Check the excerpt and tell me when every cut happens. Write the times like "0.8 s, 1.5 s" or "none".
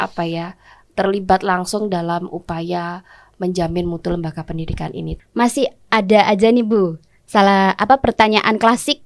5.1 s